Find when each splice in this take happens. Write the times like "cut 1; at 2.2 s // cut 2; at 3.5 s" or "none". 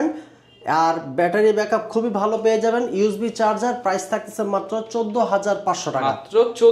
none